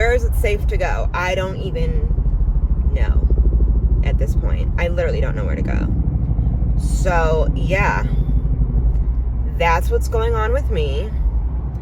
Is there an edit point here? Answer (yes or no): no